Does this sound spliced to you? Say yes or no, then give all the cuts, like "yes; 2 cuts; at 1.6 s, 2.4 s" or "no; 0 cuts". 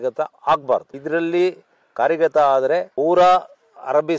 yes; 1 cut; at 0.9 s